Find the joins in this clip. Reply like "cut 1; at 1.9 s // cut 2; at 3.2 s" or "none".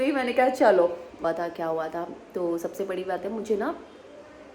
cut 1; at 1.2 s

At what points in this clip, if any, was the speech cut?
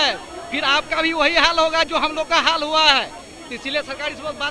none

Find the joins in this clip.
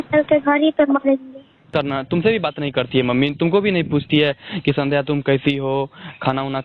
cut 1; at 1.7 s

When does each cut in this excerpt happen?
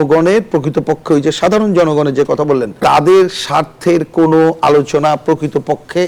none

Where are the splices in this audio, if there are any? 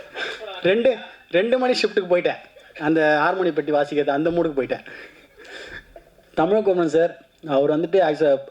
none

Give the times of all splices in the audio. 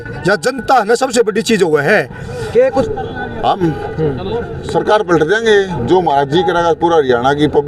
cut 1; at 2.9 s

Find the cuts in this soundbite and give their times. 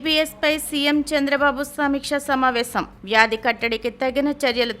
none

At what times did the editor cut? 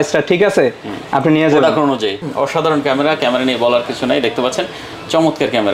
cut 1; at 2.2 s

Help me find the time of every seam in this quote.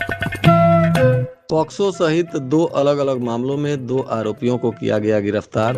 cut 1; at 1.3 s

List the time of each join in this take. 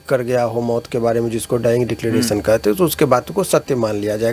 none

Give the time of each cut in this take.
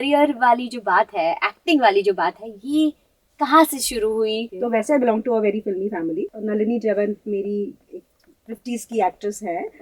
cut 1; at 4.5 s // cut 2; at 6.3 s

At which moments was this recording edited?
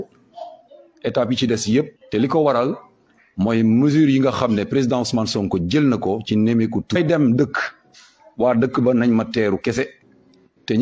cut 1; at 2.0 s // cut 2; at 7.0 s

